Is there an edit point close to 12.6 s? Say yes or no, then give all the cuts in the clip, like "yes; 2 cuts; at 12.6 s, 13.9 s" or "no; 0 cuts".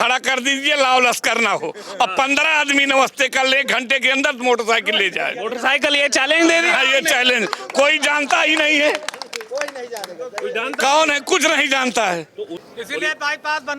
yes; 1 cut; at 12.6 s